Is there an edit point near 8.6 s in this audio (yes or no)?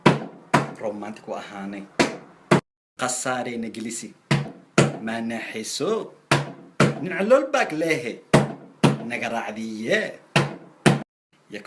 no